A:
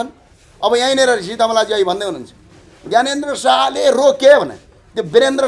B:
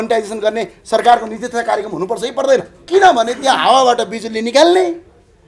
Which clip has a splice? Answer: B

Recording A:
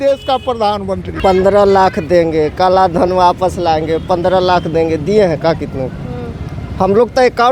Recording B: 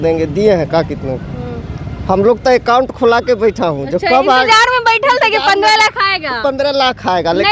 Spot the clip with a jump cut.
A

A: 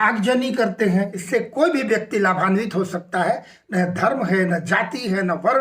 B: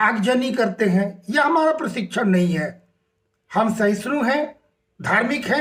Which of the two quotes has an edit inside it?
A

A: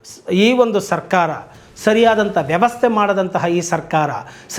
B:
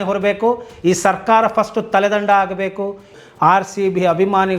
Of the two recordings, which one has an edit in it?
B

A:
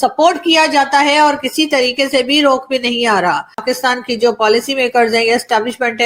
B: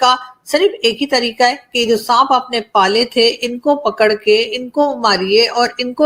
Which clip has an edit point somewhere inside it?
A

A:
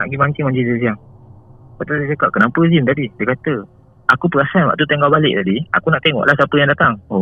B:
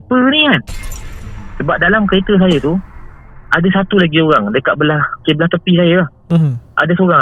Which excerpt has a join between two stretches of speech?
B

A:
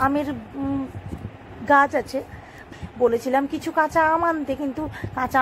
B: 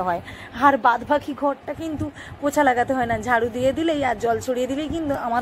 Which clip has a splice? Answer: A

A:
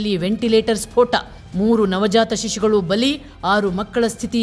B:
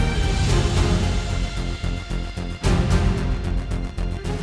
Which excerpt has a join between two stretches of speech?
B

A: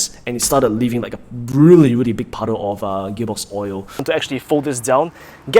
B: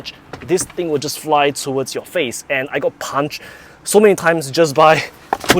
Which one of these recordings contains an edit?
A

